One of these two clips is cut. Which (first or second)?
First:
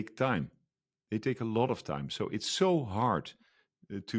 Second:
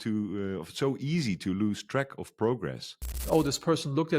second